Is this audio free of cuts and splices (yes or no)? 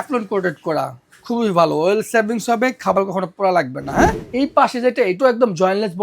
no